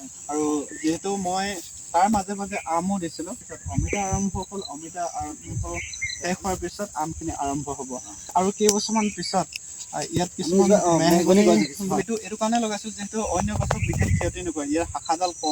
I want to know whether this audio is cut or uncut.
cut